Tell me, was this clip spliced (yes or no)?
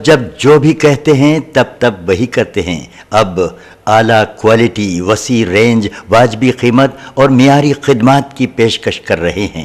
no